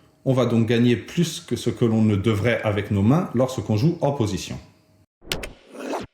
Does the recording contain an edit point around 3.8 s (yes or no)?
no